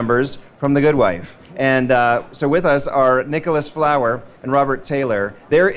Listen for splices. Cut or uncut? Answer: cut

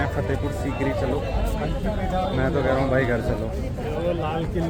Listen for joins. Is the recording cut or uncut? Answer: uncut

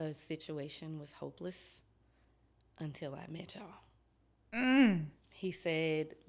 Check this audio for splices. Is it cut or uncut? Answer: uncut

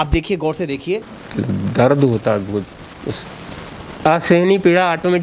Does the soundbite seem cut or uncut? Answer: cut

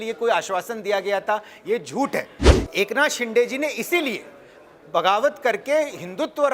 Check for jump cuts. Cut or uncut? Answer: cut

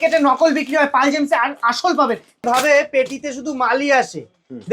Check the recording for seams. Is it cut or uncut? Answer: cut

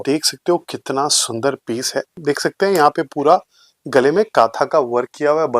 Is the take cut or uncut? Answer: cut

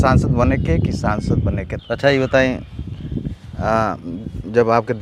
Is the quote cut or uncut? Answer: cut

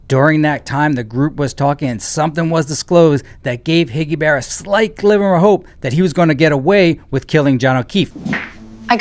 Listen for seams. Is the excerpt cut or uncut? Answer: uncut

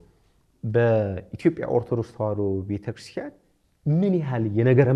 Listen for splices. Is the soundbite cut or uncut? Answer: uncut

